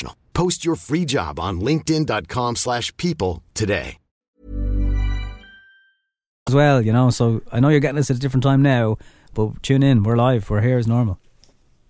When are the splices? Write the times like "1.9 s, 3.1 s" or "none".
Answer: none